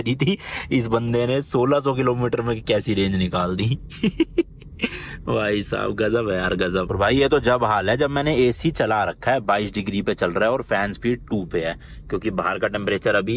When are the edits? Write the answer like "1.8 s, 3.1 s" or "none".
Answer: 6.9 s